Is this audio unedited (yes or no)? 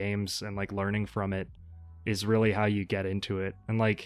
yes